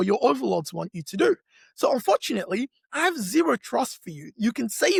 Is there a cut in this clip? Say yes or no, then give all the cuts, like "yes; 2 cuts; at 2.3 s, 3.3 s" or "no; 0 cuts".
no; 0 cuts